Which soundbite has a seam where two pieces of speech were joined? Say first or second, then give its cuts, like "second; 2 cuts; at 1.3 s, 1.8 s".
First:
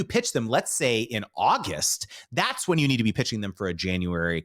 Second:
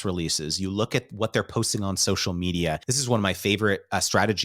second; 1 cut; at 2.9 s